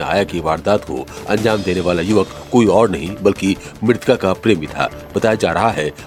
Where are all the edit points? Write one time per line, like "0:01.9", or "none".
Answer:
none

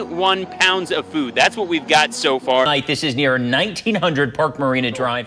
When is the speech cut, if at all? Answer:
none

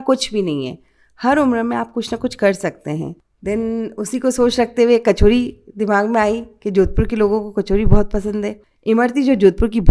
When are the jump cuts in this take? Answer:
0:03.2
0:08.6

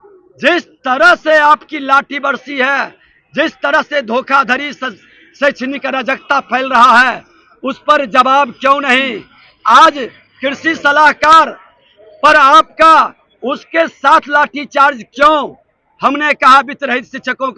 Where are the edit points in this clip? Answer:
none

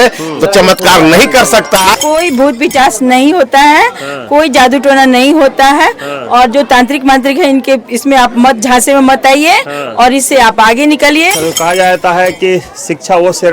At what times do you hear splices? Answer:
0:01.9
0:11.3

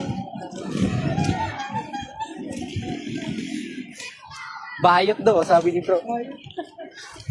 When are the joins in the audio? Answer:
none

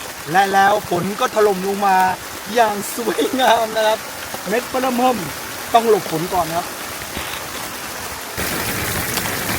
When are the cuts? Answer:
0:08.4

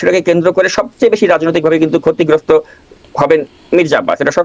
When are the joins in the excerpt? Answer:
none

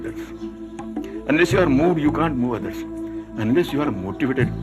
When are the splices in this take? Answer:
0:02.9

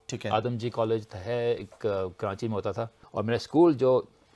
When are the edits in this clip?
0:03.0

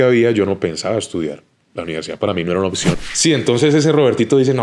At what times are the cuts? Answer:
0:03.0

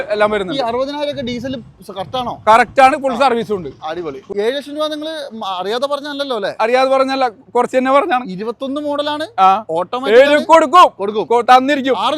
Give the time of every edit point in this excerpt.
0:04.2

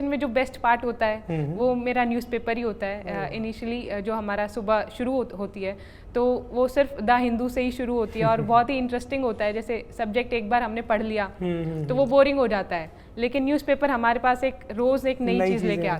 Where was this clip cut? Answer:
none

